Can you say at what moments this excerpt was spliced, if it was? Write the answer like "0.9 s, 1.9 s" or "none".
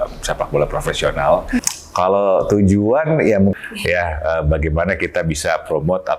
1.7 s, 3.5 s